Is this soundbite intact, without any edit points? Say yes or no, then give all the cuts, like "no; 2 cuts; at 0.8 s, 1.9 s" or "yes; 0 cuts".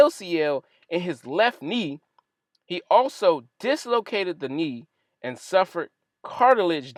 yes; 0 cuts